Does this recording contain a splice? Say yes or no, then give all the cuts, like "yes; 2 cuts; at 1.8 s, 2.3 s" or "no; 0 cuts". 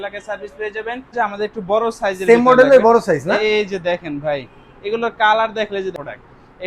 yes; 2 cuts; at 1.1 s, 5.9 s